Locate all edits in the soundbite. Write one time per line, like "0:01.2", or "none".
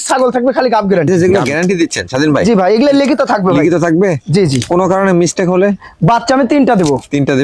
0:01.1